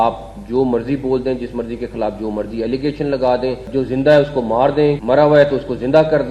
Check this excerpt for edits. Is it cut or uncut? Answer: cut